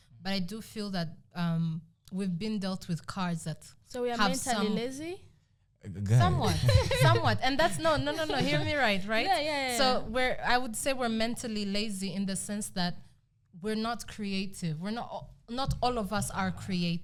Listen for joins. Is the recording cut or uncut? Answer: uncut